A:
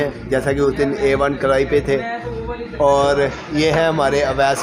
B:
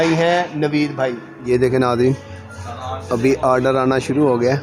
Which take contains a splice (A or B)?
B